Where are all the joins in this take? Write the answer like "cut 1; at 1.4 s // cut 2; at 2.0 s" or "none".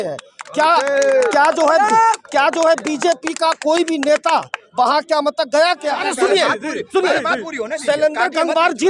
cut 1; at 6.1 s